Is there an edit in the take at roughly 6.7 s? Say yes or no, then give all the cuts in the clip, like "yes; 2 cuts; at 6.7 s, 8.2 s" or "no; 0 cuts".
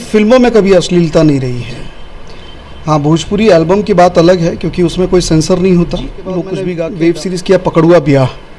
yes; 1 cut; at 6.7 s